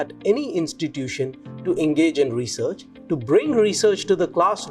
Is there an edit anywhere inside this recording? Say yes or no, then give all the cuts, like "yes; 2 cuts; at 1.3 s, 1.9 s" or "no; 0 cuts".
yes; 1 cut; at 2.9 s